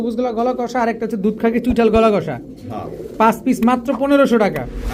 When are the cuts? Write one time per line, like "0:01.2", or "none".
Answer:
none